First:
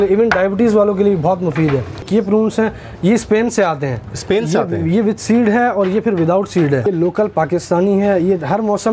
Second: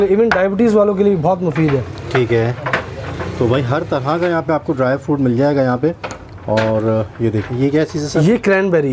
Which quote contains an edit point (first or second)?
first